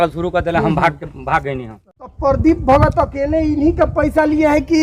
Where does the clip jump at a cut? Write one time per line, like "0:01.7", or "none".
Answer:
0:02.2